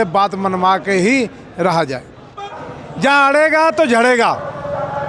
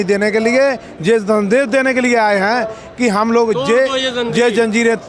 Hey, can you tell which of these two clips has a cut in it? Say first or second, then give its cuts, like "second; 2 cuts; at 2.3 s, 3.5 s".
first; 1 cut; at 2.6 s